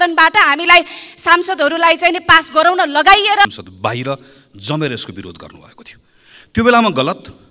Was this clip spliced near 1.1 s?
no; 1 cut; at 3.4 s

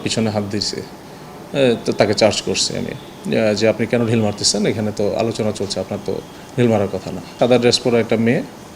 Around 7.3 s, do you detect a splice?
yes; 1 cut; at 7.3 s

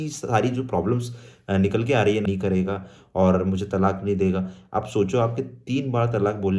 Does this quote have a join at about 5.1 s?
no; 1 cut; at 2.3 s

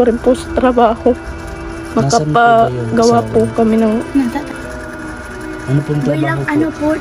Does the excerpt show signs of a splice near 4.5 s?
yes; 1 cut; at 4.5 s

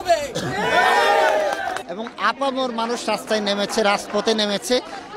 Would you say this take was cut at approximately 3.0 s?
no; 1 cut; at 1.8 s

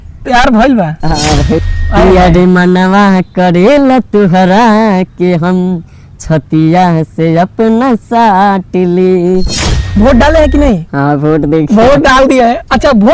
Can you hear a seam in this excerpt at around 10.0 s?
yes; 2 cuts; at 1.8 s, 10.0 s

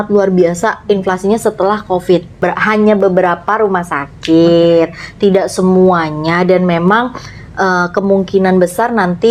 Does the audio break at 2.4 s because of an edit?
yes; 1 cut; at 2.4 s

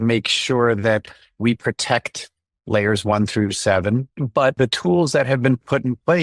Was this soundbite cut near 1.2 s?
no; 1 cut; at 4.1 s

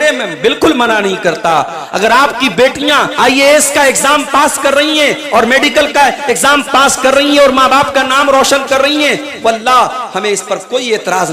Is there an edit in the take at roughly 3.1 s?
yes; 1 cut; at 3.1 s

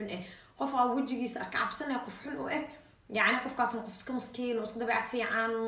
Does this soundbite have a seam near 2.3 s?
no; 0 cuts

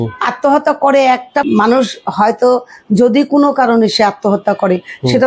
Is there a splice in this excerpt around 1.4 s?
yes; 1 cut; at 1.4 s

